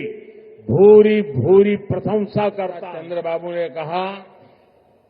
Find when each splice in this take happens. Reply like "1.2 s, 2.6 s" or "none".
2.9 s

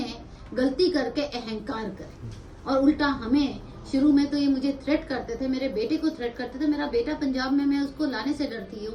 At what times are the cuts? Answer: none

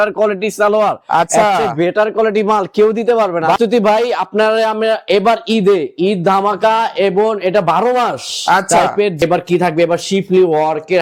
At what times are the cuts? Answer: 3.6 s, 9.2 s

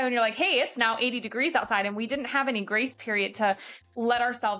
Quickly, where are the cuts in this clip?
none

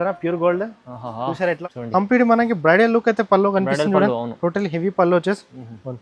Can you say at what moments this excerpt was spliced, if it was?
1.6 s

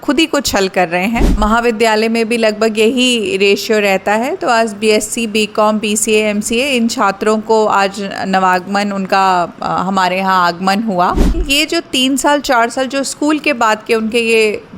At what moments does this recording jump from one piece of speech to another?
1.4 s, 11.3 s

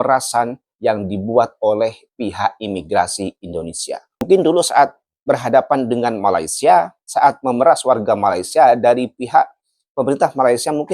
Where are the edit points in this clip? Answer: 4.2 s

